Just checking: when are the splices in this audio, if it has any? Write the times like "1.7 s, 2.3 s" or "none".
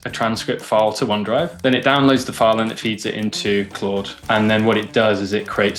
1.6 s, 4.1 s